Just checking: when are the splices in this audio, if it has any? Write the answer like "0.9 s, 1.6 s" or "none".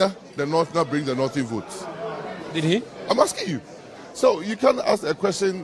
none